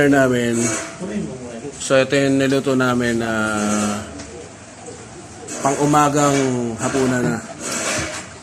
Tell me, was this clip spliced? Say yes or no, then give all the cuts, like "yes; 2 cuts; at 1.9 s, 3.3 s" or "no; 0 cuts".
no; 0 cuts